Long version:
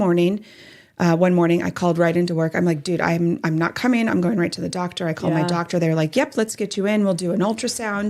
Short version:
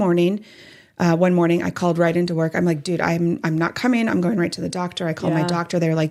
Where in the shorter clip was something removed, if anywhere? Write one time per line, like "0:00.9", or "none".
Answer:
none